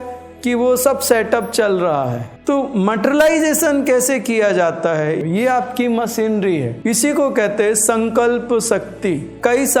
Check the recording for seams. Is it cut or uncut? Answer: cut